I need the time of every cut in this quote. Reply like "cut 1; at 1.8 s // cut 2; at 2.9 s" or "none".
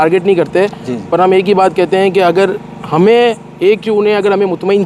none